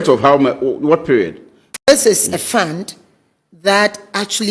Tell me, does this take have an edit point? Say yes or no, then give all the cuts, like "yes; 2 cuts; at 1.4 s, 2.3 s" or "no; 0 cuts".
yes; 1 cut; at 1.7 s